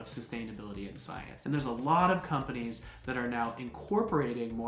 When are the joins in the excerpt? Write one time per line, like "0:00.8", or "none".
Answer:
0:01.3